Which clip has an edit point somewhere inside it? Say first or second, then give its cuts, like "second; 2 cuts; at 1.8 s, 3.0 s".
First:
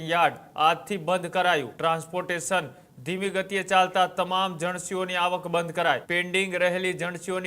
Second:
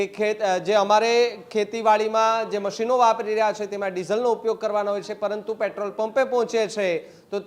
first; 2 cuts; at 1.7 s, 6.0 s